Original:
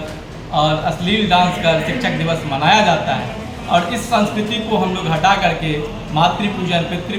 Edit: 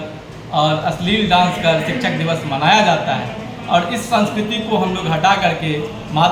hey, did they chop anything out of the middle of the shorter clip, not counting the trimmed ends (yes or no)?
no